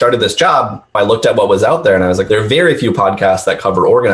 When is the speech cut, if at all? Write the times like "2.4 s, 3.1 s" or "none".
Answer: 1.0 s, 2.2 s